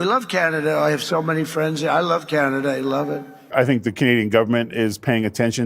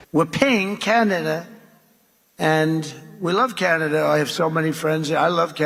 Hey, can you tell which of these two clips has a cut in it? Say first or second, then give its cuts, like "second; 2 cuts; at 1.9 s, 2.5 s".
first; 1 cut; at 3.5 s